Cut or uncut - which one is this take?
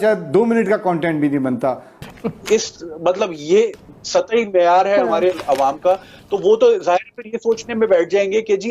cut